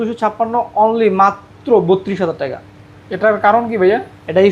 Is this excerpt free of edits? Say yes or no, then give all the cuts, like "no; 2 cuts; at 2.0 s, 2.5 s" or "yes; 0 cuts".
yes; 0 cuts